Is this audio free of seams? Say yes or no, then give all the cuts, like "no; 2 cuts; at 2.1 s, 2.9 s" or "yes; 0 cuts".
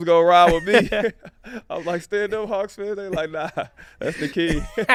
yes; 0 cuts